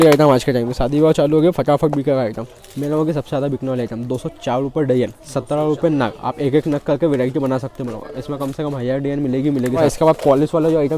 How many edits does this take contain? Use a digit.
2